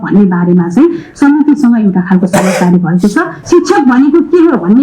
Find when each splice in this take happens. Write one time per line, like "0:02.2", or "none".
0:03.4